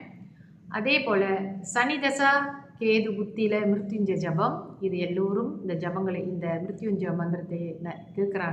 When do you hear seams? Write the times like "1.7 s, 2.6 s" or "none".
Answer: none